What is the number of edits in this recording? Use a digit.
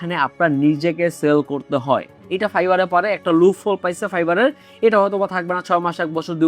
1